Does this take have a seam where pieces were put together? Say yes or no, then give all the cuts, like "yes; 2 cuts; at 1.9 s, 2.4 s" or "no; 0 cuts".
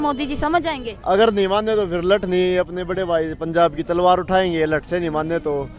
no; 0 cuts